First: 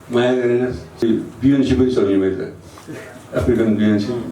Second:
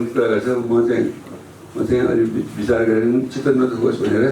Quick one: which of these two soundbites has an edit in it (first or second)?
first